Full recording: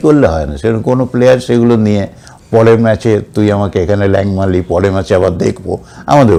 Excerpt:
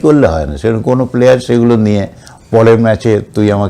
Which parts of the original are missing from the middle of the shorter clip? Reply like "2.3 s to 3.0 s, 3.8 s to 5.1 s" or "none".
none